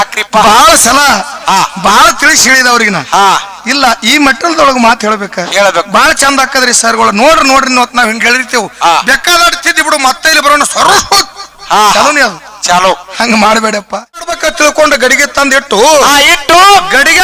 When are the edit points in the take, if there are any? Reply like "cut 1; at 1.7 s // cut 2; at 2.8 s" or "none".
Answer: cut 1; at 14.3 s